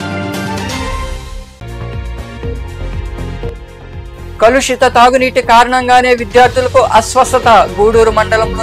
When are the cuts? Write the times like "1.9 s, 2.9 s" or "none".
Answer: none